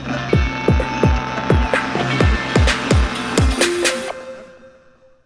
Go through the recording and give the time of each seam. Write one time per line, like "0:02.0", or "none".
0:03.3